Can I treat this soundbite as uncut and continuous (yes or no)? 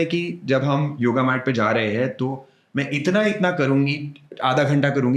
no